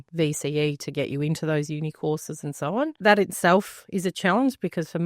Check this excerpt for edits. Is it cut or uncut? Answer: cut